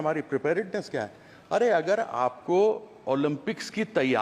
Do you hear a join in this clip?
no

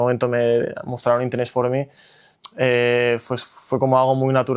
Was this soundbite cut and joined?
no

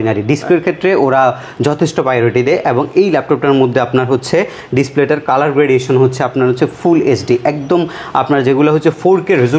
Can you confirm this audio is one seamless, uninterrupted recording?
yes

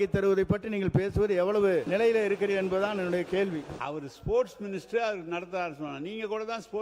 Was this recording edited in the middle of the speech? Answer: yes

